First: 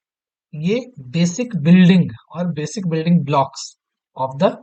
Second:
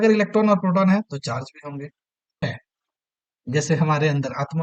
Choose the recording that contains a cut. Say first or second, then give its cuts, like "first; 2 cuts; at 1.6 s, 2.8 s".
second; 1 cut; at 2.4 s